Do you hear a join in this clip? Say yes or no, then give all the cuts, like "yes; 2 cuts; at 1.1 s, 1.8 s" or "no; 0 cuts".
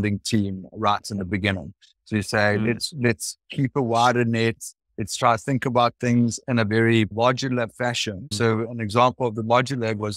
yes; 2 cuts; at 7.1 s, 8.3 s